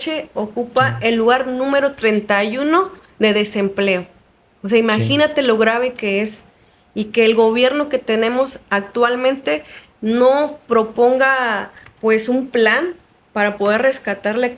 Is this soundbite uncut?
yes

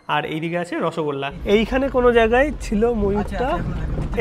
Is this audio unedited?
no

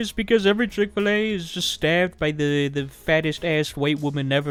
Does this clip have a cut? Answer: no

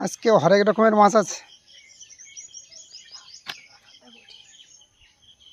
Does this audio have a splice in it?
no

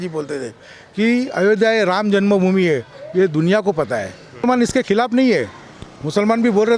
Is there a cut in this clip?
yes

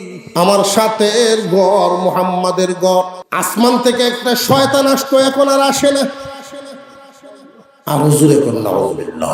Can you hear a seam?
yes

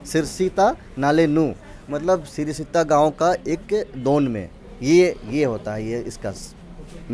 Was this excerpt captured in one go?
yes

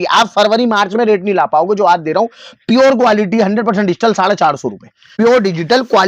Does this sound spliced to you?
yes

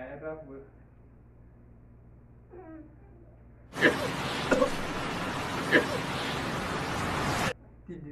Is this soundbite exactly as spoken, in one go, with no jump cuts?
yes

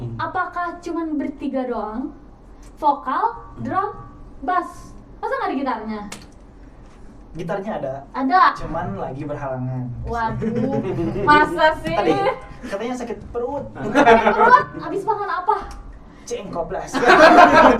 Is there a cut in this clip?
no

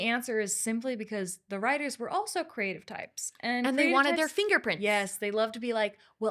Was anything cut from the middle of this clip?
no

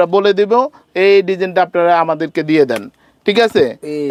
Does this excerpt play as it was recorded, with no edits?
yes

